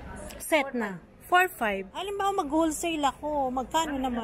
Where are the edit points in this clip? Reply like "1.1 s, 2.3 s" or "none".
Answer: 2.1 s